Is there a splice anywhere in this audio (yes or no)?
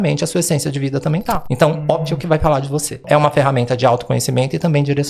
yes